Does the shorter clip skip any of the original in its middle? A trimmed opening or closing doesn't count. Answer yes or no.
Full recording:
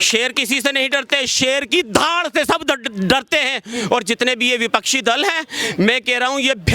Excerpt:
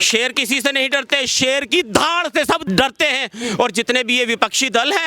yes